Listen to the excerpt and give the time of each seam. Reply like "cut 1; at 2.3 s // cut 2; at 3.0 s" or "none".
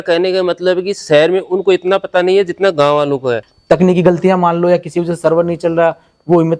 cut 1; at 3.5 s